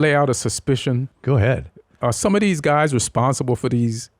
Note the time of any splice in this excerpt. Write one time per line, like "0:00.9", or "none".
0:01.5